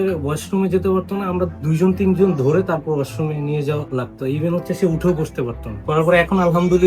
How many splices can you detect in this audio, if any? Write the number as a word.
one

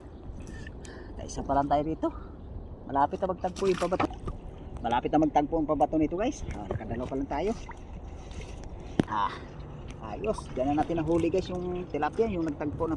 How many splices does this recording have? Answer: two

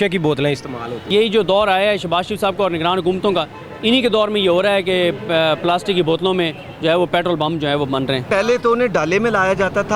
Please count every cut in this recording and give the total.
two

